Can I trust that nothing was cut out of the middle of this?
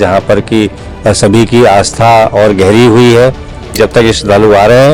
no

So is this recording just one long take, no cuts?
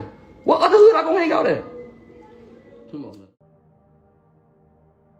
yes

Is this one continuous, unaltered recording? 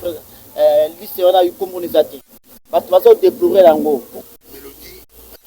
no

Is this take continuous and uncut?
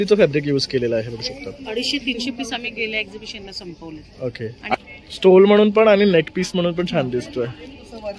no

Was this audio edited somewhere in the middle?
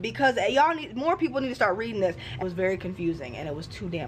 yes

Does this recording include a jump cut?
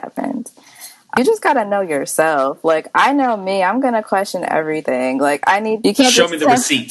yes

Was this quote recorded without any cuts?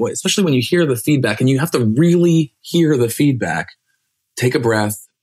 yes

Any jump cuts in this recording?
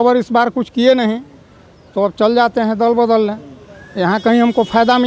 no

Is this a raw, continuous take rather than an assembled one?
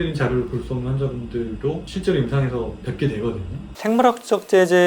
no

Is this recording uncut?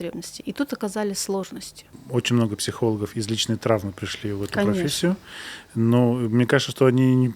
no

